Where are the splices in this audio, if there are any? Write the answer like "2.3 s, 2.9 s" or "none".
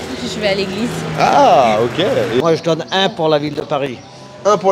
2.4 s